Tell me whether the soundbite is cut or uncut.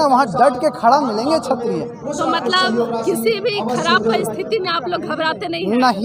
uncut